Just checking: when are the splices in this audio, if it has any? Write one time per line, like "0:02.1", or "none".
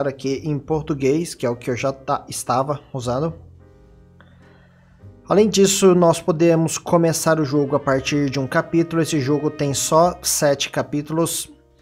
0:02.5